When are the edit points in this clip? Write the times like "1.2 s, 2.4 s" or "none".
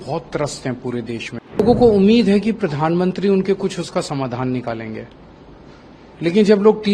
1.6 s